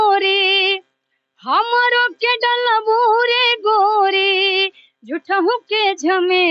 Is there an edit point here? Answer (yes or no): no